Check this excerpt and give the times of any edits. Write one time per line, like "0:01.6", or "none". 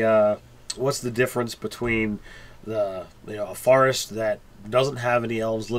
0:02.6